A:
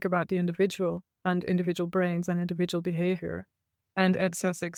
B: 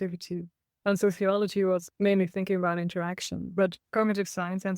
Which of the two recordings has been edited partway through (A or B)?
B